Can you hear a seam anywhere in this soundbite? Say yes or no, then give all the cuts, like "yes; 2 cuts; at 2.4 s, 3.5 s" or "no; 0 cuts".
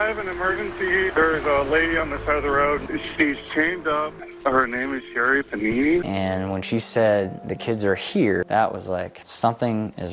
yes; 3 cuts; at 2.9 s, 4.2 s, 6.0 s